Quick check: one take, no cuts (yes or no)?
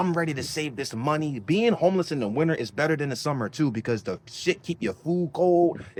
yes